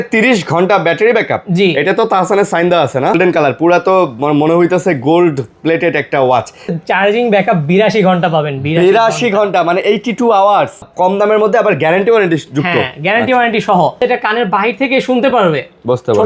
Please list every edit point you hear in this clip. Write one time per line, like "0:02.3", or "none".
0:03.2
0:06.7
0:10.9
0:14.0